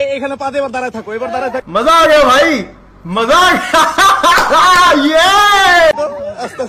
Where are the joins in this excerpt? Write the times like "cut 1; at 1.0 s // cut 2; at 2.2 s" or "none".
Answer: none